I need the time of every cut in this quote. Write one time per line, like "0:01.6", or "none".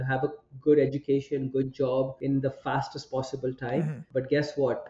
0:02.2
0:04.0

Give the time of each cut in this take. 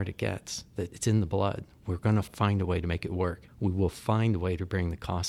0:00.9
0:02.3
0:03.5

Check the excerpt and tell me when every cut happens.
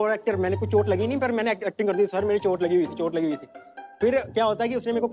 none

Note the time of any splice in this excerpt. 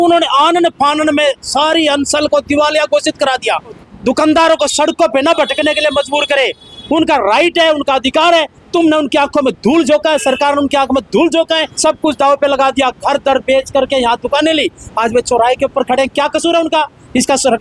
0:03.9
0:11.7

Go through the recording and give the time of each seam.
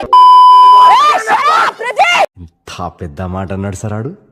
0:00.9

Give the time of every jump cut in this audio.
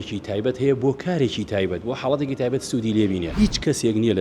0:03.3

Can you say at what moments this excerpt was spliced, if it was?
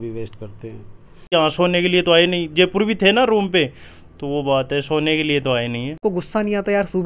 0:01.2
0:06.0

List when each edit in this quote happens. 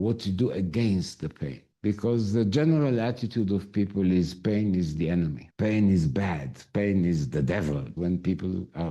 0:07.9

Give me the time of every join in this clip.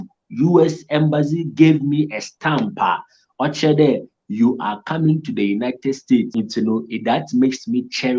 0:06.3

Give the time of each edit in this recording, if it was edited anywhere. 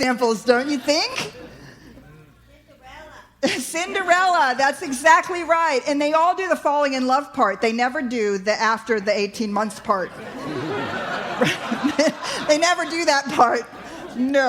none

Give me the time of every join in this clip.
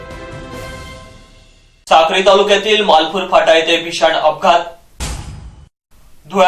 0:01.5

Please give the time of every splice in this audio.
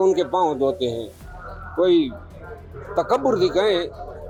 none

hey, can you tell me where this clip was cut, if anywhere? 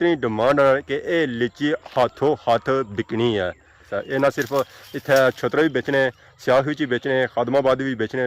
0:03.8

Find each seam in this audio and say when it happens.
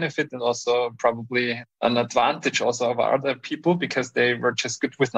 0:01.8

